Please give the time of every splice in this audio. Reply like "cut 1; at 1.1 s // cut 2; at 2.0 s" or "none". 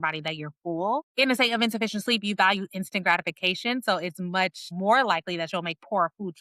cut 1; at 1.1 s // cut 2; at 4.7 s